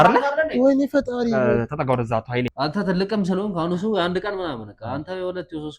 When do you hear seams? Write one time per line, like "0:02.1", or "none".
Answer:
0:02.5